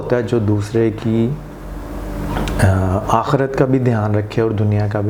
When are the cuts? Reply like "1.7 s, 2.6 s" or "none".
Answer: none